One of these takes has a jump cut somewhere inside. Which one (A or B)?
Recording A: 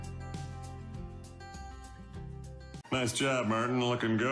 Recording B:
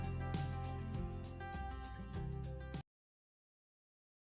A